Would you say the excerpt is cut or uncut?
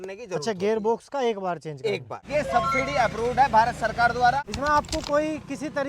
cut